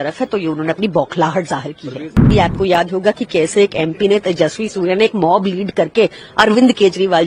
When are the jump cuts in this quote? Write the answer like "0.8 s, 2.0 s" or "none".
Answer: 2.3 s

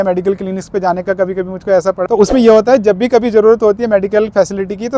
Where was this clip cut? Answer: 2.0 s

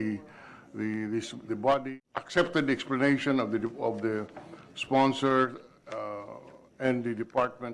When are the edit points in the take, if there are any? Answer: 1.9 s

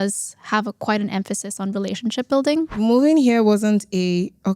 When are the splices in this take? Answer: 2.7 s

